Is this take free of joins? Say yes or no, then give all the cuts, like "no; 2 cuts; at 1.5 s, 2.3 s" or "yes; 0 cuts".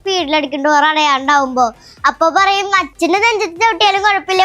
no; 1 cut; at 2.9 s